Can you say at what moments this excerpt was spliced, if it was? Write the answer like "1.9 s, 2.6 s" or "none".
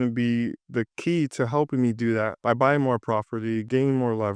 none

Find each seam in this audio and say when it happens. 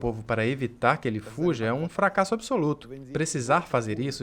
2.9 s

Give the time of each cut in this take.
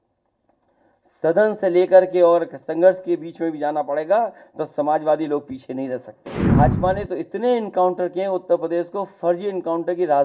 6.5 s

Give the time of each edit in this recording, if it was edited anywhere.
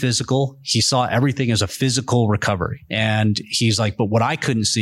2.8 s

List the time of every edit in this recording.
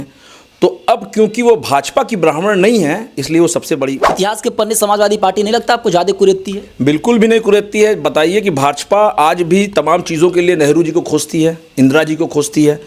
4.0 s

